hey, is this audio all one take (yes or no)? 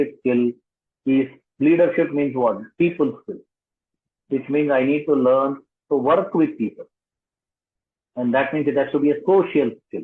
yes